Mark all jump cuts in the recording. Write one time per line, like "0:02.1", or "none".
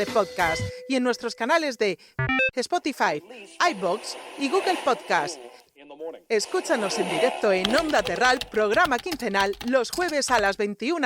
none